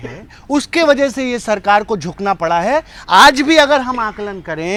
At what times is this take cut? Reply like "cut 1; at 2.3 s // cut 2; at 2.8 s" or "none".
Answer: none